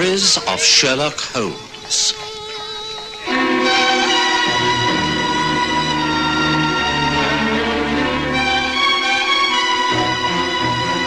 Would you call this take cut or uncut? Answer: uncut